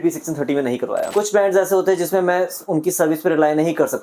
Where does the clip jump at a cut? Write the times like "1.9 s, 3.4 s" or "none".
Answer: 1.1 s